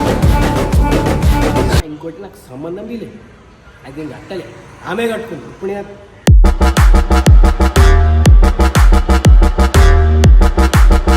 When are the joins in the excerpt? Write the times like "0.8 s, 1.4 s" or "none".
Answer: 1.9 s